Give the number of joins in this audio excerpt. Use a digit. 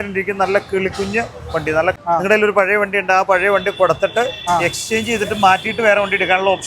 1